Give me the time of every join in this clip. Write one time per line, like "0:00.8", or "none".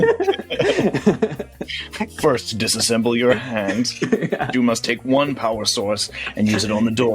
0:04.5